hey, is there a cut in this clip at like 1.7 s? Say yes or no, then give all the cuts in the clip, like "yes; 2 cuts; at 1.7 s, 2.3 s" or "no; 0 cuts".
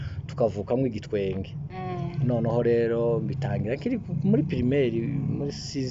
no; 0 cuts